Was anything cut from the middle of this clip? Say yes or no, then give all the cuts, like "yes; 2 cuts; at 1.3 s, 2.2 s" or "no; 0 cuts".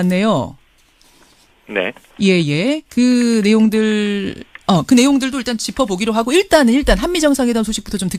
no; 0 cuts